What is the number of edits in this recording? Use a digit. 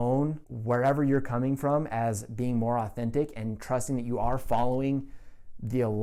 0